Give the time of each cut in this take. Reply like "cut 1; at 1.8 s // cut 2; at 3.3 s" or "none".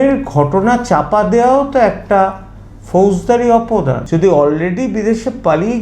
cut 1; at 4.0 s